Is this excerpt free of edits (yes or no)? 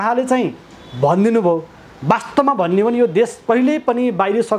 yes